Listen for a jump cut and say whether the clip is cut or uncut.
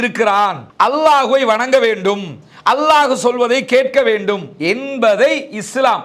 uncut